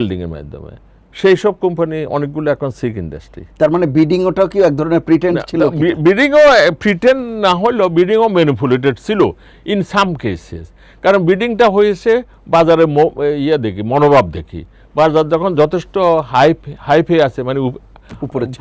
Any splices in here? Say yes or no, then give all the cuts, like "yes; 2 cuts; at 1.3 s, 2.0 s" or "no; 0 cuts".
no; 0 cuts